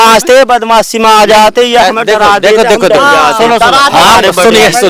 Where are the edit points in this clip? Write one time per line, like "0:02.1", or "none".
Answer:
none